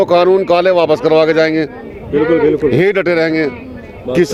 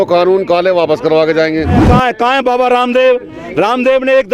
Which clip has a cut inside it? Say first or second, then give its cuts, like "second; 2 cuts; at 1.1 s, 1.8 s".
second; 1 cut; at 1.8 s